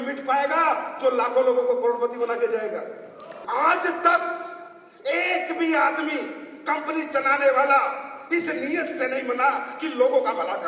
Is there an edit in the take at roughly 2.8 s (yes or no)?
yes